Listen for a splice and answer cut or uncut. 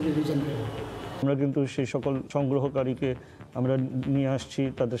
cut